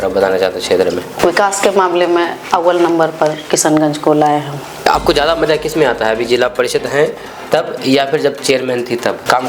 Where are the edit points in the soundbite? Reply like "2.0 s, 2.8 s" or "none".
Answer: 1.1 s, 4.9 s